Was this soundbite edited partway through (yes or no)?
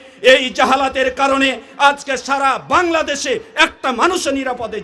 no